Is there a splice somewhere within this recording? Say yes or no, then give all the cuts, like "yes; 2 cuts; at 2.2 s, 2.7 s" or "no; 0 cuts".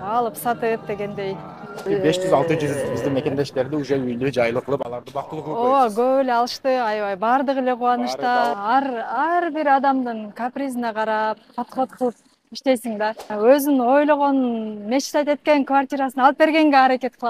yes; 3 cuts; at 1.8 s, 8.6 s, 13.2 s